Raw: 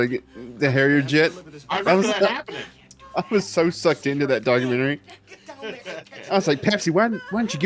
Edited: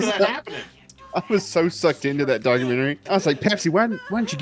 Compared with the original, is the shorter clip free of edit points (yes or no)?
no